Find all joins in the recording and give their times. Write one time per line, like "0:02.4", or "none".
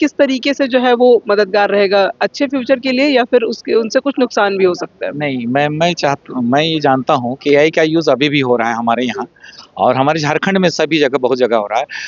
none